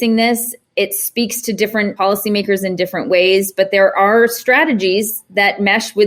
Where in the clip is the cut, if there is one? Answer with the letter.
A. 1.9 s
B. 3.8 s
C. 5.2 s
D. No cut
A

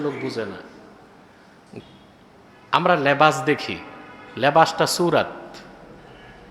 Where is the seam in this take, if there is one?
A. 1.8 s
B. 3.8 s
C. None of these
A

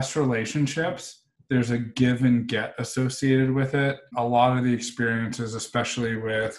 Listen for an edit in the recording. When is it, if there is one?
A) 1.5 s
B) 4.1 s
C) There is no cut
B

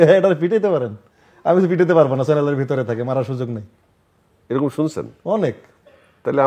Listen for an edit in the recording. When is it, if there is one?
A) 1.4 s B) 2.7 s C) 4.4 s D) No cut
D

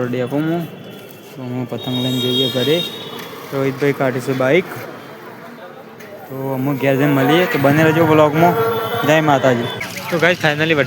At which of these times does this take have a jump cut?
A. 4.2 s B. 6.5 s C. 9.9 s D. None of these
C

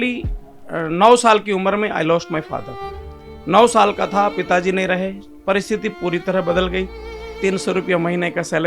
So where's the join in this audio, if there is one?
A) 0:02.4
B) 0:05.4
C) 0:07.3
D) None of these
C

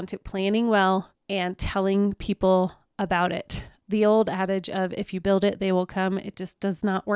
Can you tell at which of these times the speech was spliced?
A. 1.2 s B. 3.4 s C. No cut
A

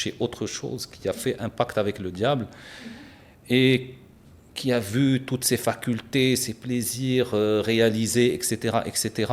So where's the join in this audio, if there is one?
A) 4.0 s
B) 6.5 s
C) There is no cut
C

